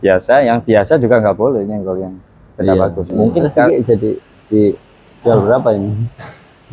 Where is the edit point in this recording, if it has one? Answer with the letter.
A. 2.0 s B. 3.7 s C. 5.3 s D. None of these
B